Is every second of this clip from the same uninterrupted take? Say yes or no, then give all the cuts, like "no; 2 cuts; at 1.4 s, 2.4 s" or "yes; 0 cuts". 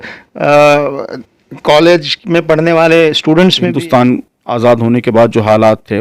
no; 1 cut; at 3.6 s